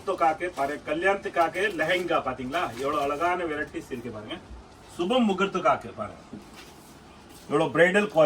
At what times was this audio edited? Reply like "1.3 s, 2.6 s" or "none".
none